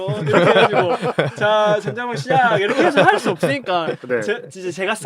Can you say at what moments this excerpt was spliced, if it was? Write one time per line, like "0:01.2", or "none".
none